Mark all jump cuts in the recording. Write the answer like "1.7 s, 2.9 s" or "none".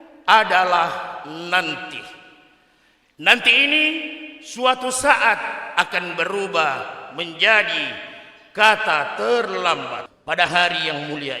10.1 s